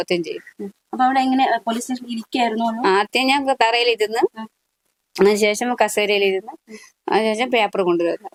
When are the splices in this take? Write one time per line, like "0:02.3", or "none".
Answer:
none